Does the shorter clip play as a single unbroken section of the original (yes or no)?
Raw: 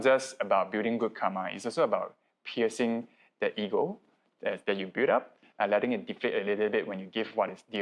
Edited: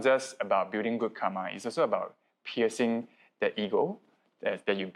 yes